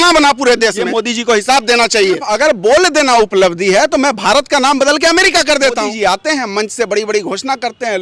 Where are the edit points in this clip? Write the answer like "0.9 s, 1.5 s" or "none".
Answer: 0.8 s, 2.3 s, 5.9 s